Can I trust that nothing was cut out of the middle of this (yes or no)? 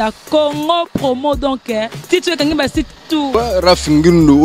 no